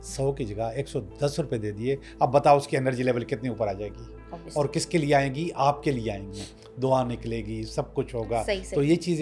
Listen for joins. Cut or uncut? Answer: uncut